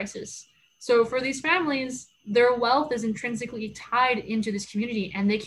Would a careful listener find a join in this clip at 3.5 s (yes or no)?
no